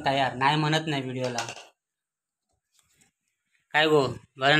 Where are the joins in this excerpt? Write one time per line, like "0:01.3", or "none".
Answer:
none